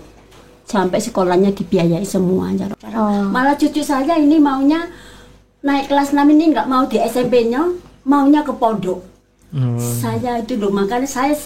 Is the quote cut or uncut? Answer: cut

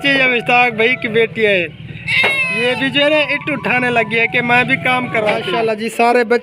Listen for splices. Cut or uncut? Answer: cut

